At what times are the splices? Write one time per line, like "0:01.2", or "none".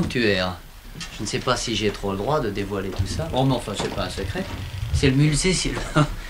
none